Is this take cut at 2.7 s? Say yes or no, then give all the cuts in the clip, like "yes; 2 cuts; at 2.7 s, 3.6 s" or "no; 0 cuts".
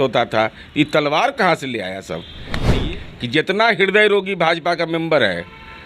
yes; 1 cut; at 2.7 s